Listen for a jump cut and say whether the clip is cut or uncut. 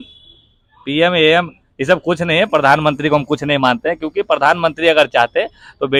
uncut